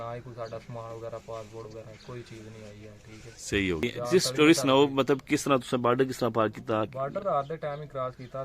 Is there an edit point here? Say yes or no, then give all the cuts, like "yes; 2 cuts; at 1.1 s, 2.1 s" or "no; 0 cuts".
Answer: yes; 1 cut; at 3.8 s